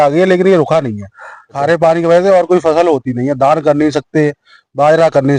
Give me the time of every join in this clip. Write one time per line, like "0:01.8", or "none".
0:01.6